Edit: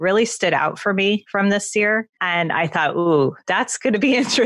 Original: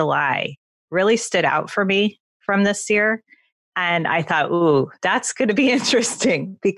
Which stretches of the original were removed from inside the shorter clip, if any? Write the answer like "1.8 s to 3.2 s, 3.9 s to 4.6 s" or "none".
2.2 s to 2.4 s, 3.3 s to 3.7 s

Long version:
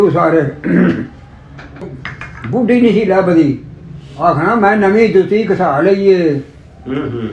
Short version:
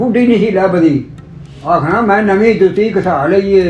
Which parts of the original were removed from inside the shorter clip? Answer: none

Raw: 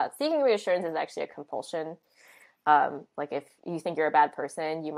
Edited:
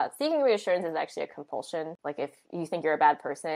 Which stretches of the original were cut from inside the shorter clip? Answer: 2.0 s to 3.1 s

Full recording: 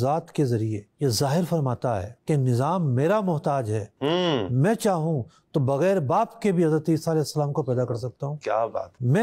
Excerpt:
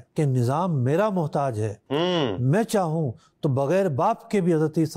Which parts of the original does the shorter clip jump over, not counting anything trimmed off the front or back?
none

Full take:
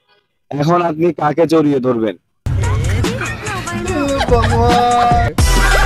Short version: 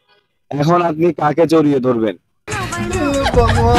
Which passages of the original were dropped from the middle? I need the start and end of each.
2.4 s to 3.3 s

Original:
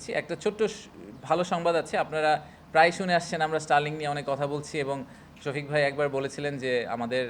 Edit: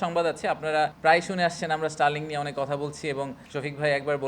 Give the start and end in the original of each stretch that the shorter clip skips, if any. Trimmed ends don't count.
2.4 s to 2.7 s, 5.1 s to 5.3 s

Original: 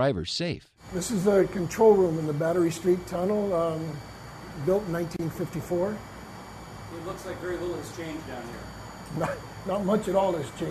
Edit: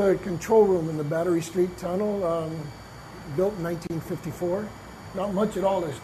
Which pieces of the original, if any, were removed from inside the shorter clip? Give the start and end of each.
6.3 s to 9.5 s

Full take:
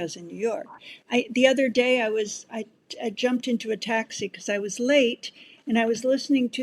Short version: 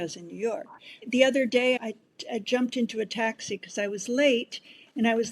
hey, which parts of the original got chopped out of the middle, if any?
1.0 s to 1.3 s, 2.0 s to 2.5 s

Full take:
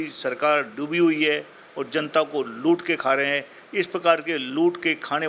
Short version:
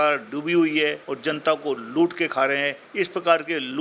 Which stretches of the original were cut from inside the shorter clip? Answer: 1.5 s to 1.8 s, 3.5 s to 3.6 s

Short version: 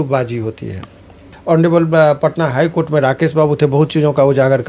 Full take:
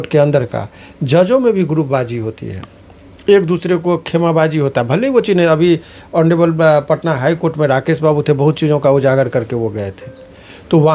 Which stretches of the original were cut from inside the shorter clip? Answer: 3.1 s to 5.9 s

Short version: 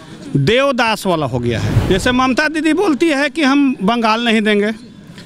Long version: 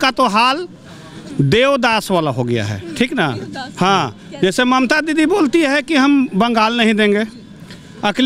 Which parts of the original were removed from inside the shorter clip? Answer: 2.8 s to 4.2 s

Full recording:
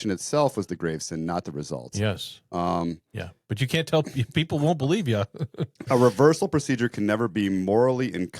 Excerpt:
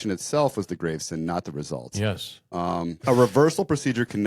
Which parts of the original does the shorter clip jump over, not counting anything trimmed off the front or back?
3.0 s to 5.8 s

